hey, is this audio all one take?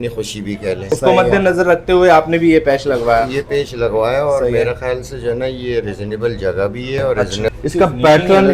no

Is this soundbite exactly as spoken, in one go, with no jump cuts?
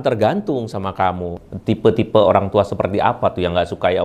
no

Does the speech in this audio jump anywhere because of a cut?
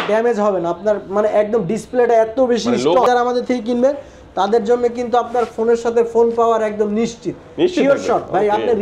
yes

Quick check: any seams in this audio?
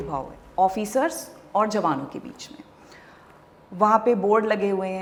no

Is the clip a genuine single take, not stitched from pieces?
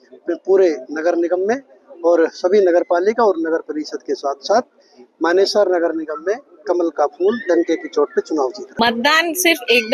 no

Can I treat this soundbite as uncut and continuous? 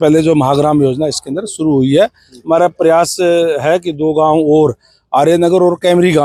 yes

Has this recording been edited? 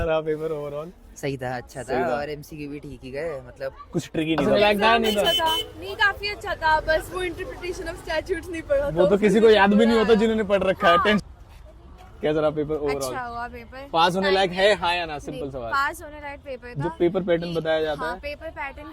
yes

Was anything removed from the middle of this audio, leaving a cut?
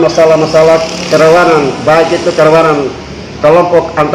no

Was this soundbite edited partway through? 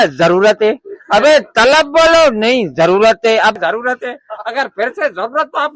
yes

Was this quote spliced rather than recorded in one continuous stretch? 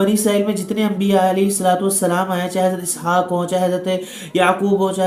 no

